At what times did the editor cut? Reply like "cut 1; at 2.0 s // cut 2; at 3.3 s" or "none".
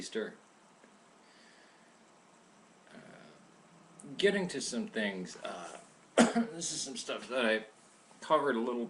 none